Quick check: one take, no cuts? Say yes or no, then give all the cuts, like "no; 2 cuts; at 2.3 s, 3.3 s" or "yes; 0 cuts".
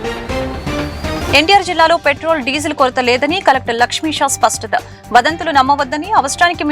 no; 1 cut; at 1.2 s